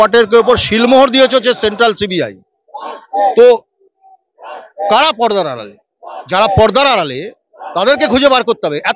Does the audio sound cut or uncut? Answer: uncut